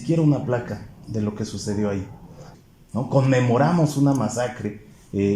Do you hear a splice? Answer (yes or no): yes